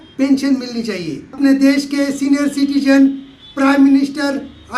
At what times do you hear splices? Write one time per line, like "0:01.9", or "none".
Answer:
0:01.2